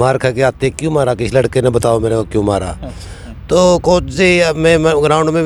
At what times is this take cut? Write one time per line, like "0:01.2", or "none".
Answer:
none